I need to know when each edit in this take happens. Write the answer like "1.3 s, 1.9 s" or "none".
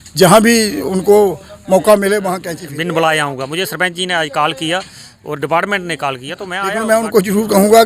2.4 s, 6.7 s